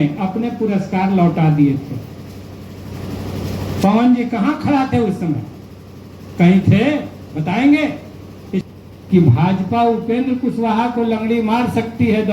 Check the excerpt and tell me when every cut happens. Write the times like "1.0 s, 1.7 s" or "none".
8.7 s